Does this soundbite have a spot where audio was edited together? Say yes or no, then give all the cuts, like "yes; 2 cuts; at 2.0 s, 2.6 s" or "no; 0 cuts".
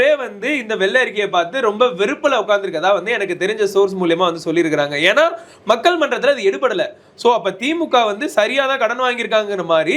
no; 0 cuts